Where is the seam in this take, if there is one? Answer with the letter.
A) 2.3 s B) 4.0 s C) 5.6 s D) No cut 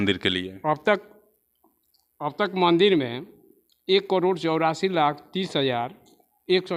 D